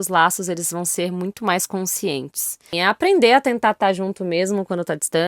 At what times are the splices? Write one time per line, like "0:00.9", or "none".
0:02.7